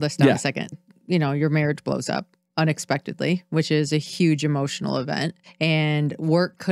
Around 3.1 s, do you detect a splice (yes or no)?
no